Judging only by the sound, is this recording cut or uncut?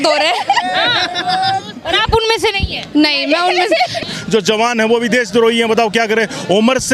cut